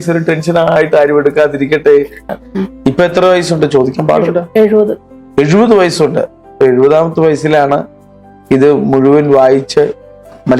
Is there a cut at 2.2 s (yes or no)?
yes